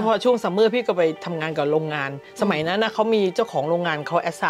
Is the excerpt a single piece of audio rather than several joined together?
yes; 0 cuts

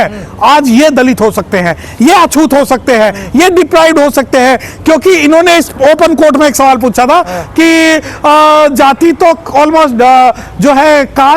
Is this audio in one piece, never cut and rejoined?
yes; 0 cuts

